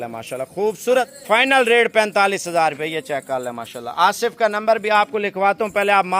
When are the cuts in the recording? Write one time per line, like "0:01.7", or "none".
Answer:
0:01.1

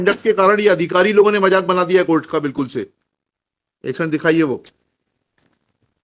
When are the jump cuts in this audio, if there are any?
none

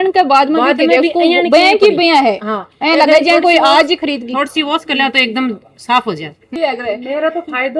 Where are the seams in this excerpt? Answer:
0:06.5

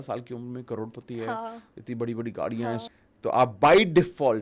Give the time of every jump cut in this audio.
0:02.9

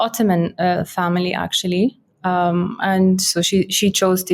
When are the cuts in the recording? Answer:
none

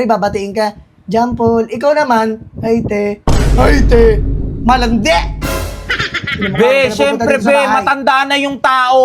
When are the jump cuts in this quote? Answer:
none

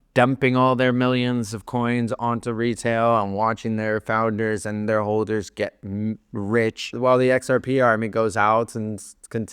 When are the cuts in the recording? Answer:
0:07.0

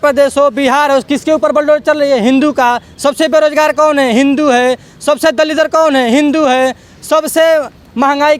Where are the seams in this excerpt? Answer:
none

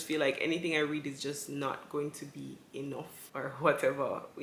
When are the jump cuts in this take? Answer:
none

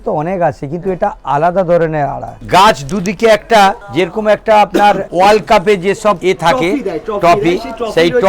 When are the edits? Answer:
0:02.3
0:03.8
0:05.1
0:06.2

